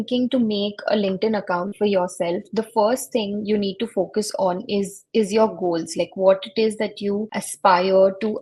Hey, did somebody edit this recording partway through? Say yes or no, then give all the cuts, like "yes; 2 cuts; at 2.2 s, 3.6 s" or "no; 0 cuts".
no; 0 cuts